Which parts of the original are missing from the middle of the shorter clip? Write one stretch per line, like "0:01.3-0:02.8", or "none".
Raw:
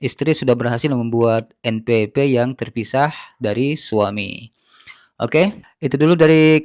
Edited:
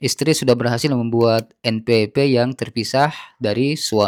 none